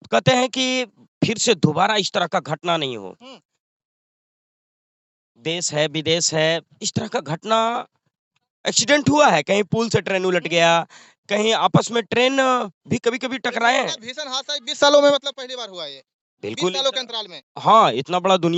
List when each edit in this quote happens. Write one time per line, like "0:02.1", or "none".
none

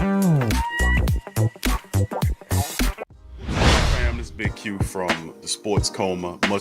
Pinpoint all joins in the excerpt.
0:03.0
0:04.0

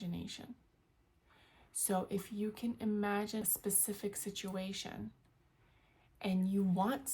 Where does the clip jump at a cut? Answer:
0:03.4

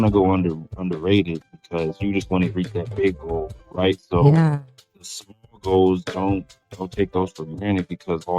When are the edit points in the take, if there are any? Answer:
0:05.1

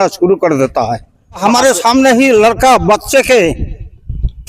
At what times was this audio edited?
0:01.4

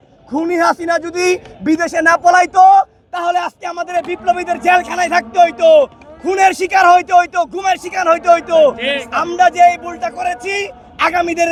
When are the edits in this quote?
none

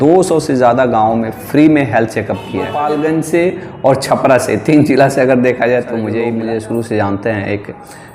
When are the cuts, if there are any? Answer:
0:02.7
0:06.3

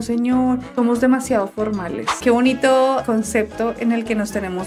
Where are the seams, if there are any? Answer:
0:02.1

